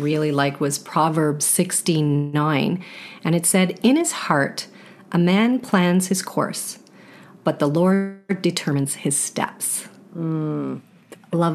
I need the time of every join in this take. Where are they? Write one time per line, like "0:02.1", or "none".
none